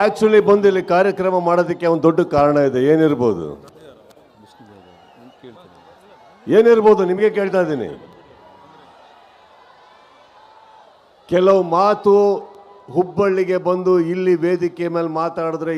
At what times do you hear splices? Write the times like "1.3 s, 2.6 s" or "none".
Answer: none